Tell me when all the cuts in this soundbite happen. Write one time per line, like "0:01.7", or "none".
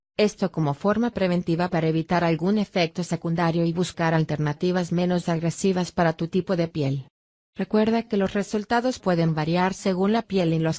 0:01.5